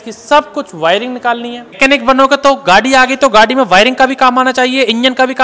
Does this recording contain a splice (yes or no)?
yes